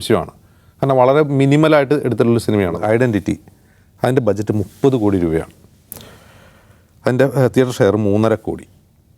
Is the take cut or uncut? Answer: cut